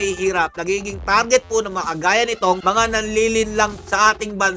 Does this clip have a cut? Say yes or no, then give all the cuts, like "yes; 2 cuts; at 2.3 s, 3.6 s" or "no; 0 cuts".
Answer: no; 0 cuts